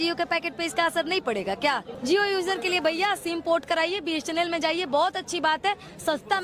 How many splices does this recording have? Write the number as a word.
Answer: one